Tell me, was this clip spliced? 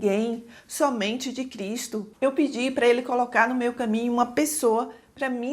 yes; 1 cut; at 2.1 s

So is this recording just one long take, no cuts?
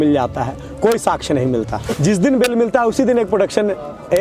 no; 1 cut; at 1.9 s

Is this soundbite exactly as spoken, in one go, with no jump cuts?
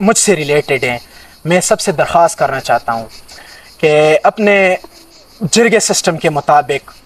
yes; 0 cuts

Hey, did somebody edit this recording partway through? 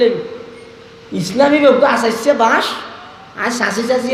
no; 0 cuts

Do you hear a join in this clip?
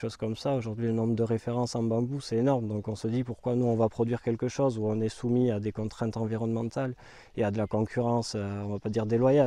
no; 0 cuts

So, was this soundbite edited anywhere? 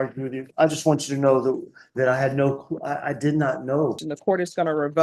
yes; 1 cut; at 4.0 s

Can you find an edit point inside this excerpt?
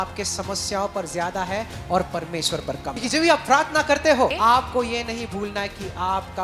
yes; 2 cuts; at 3.0 s, 4.3 s

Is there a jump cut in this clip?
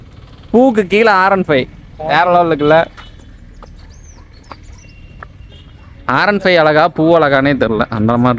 no; 0 cuts

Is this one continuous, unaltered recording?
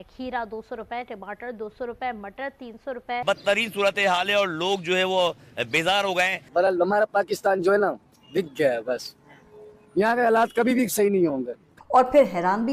no; 2 cuts; at 3.2 s, 11.8 s

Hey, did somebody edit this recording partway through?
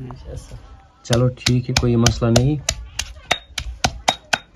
no; 0 cuts

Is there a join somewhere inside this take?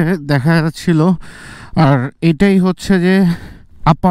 no; 0 cuts

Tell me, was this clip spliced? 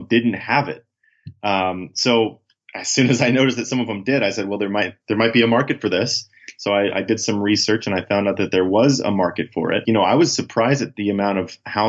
yes; 2 cuts; at 5.0 s, 9.8 s

